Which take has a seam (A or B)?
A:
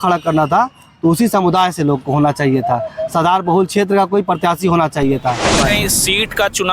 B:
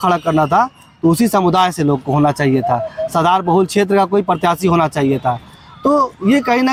A